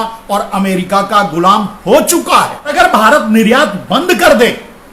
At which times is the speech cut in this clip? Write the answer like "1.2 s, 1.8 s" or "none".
2.7 s